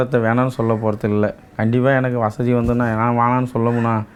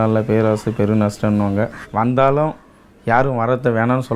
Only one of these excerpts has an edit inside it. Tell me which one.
second; 1 cut; at 1.8 s

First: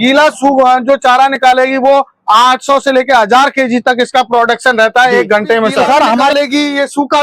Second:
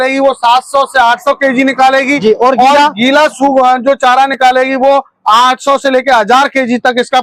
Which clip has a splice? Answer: first; 1 cut; at 6.3 s

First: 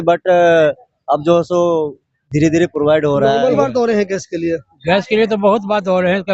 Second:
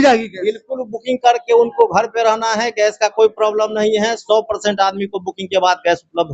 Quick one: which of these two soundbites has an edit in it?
first; 1 cut; at 3.4 s

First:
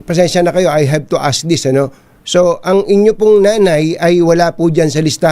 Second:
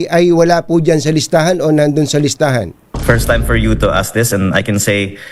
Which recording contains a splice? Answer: second; 1 cut; at 2.8 s

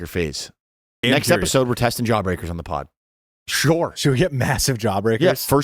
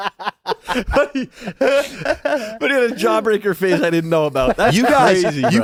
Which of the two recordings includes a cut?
first; 1 cut; at 1.0 s

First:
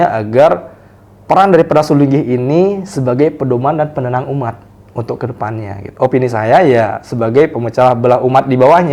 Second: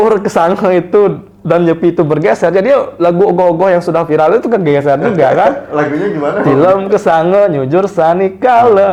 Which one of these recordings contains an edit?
first; 1 cut; at 5.9 s

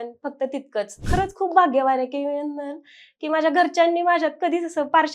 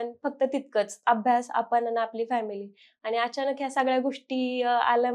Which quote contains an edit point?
first; 1 cut; at 1.0 s

